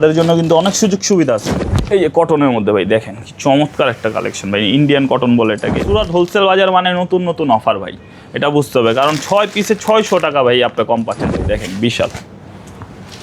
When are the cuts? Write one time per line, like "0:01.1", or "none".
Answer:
0:01.5
0:05.8
0:11.4